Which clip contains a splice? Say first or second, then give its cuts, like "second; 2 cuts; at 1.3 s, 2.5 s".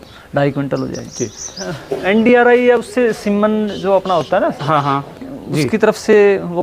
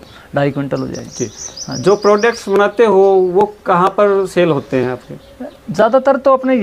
first; 1 cut; at 1.7 s